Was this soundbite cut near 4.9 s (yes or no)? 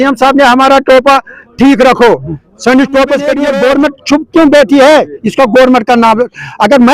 no